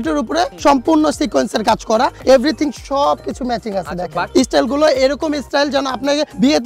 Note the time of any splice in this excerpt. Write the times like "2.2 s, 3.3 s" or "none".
2.2 s, 4.3 s